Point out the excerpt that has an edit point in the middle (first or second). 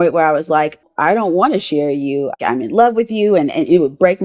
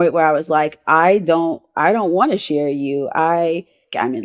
first